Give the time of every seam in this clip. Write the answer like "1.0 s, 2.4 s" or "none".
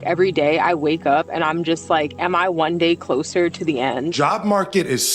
4.1 s